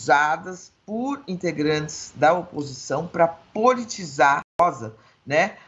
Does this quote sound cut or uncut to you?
cut